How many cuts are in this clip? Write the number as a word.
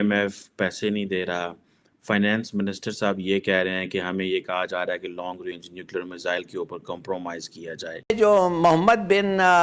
one